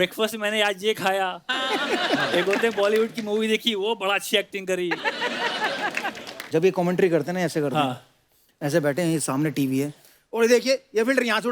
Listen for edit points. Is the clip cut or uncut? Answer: cut